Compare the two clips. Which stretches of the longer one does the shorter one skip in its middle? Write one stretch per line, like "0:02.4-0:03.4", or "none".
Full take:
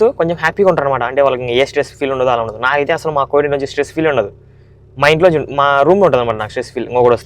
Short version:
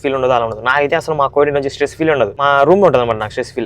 0:04.3-0:05.6